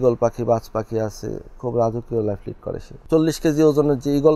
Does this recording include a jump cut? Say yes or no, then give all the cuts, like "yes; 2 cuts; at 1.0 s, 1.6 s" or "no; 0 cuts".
yes; 1 cut; at 3.1 s